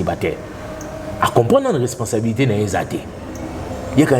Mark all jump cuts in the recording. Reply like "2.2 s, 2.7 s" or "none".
none